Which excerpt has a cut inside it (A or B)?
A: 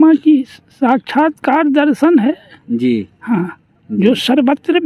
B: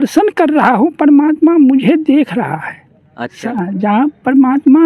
B